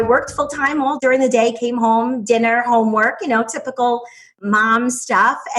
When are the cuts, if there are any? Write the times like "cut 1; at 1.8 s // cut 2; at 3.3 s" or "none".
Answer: cut 1; at 1.0 s // cut 2; at 4.4 s